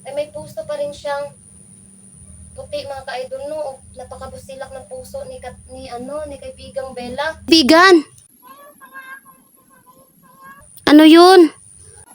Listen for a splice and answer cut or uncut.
cut